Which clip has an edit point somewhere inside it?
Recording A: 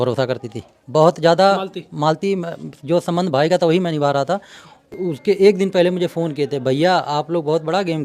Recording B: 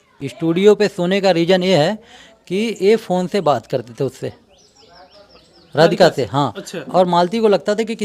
A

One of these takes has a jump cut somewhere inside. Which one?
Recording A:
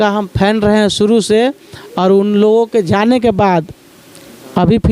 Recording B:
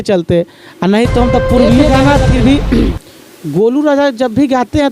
B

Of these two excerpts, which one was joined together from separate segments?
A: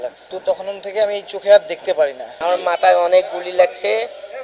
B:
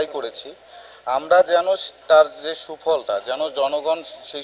A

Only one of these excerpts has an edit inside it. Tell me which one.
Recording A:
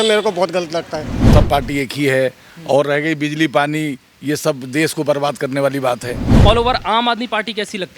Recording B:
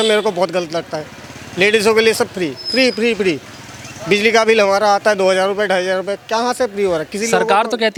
A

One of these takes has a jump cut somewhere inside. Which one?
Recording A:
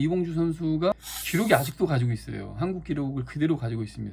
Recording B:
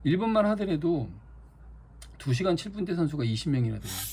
A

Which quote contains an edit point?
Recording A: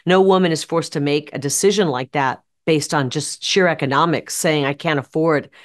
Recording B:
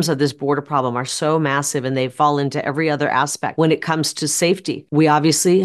B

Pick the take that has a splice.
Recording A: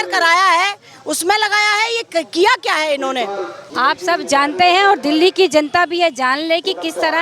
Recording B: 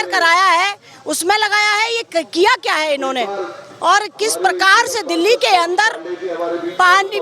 A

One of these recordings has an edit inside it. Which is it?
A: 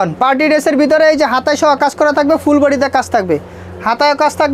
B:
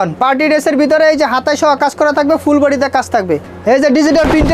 B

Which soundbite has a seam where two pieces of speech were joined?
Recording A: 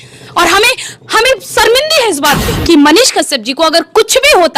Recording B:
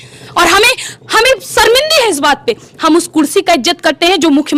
A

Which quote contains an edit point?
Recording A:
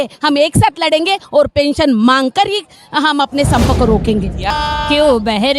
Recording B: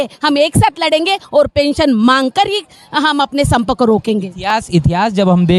A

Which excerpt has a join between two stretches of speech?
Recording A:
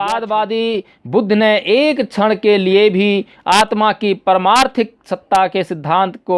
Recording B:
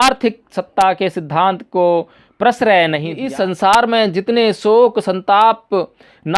B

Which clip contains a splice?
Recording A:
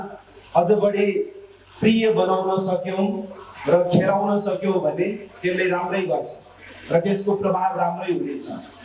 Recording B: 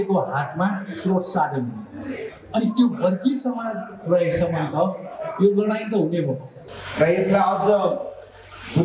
B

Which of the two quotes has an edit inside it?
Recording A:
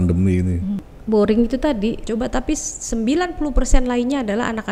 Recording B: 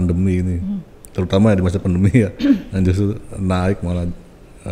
A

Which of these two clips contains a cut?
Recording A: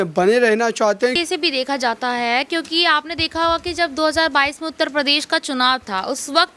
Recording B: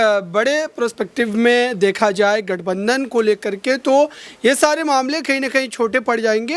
A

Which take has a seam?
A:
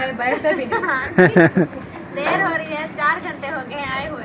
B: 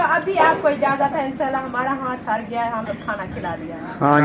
B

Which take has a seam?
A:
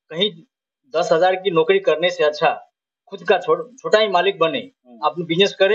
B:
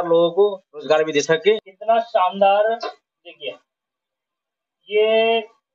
B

